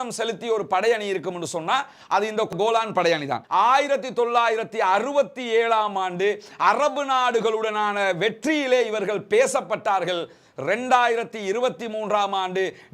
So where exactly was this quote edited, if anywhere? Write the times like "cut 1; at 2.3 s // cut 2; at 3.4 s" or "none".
cut 1; at 3.4 s